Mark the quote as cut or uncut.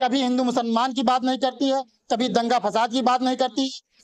uncut